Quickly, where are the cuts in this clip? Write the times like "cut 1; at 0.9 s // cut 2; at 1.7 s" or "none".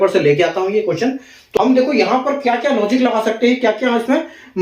cut 1; at 1.4 s